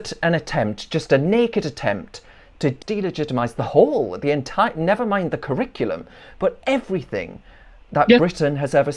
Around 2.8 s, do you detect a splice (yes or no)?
yes